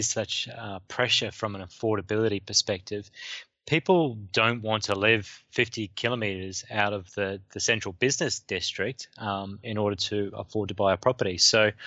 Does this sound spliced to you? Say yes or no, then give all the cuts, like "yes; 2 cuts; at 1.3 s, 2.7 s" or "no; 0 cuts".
no; 0 cuts